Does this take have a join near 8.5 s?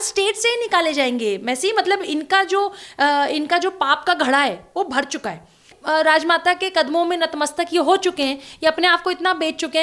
no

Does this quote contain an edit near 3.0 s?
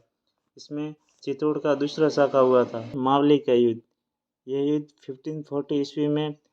yes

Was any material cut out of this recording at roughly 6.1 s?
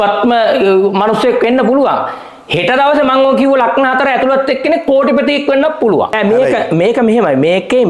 yes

